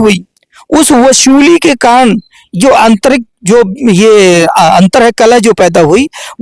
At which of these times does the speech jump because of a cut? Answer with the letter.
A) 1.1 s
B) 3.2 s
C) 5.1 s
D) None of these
D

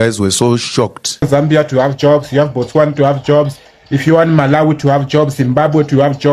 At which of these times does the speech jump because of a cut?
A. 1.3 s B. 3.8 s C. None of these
A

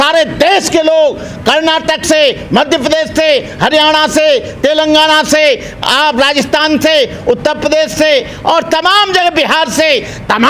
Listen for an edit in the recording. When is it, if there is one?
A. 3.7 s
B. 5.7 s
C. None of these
C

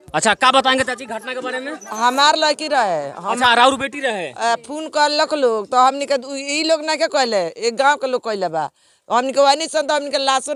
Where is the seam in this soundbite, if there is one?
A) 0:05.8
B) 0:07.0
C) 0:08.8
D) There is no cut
D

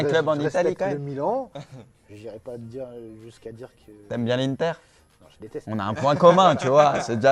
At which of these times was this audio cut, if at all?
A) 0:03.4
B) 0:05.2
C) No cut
A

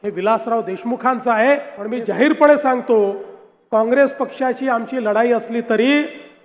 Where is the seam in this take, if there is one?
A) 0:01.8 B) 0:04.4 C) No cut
A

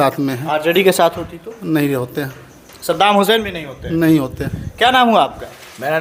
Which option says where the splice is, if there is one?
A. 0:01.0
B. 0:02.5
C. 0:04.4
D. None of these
D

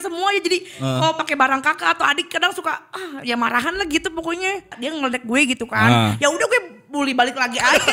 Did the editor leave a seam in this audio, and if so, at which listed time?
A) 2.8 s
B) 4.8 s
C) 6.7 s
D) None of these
B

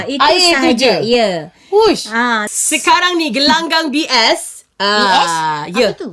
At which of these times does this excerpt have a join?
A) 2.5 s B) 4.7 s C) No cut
A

